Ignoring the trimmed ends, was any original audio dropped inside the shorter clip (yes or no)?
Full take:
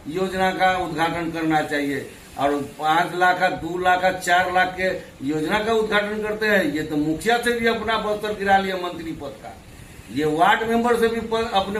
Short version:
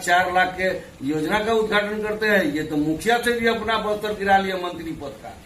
no